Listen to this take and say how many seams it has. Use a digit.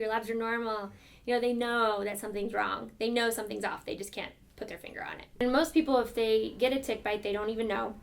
1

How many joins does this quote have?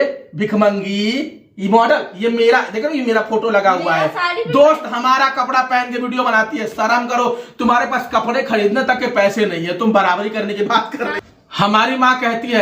1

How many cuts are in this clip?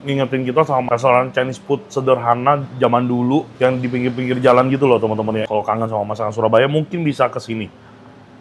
2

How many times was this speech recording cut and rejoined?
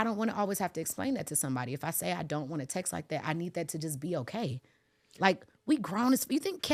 0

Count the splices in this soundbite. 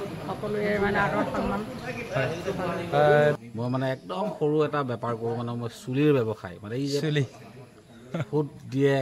1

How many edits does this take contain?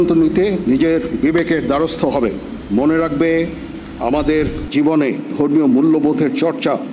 1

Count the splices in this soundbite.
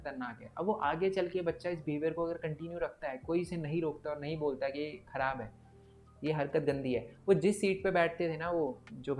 0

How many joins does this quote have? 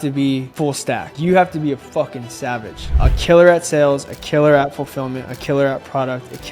2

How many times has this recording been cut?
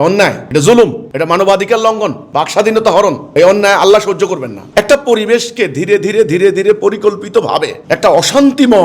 1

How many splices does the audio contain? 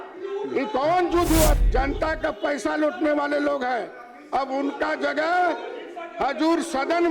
1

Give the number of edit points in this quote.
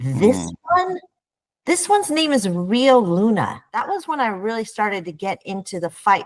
1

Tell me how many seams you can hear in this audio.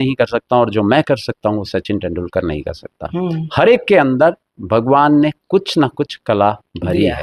0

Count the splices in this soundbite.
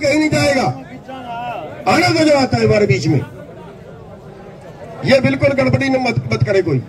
0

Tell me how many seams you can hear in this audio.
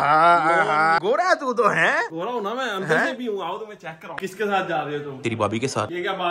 2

